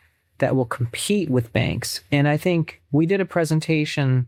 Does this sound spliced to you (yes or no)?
no